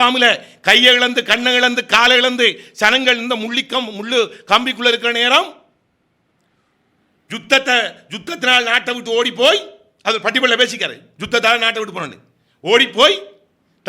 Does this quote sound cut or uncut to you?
uncut